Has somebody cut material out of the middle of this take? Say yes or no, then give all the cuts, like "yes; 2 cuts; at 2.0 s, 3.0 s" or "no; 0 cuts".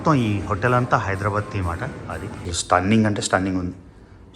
yes; 1 cut; at 2.5 s